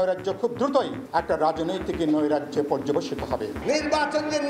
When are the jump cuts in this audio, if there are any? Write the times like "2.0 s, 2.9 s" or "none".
1.0 s, 3.6 s